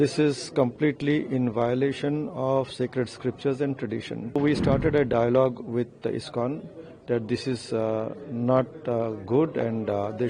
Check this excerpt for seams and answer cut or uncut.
cut